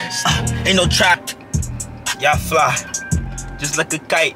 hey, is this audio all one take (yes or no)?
no